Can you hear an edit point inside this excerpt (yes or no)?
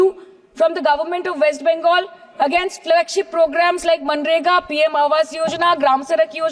no